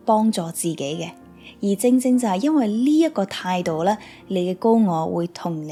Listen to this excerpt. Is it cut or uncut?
uncut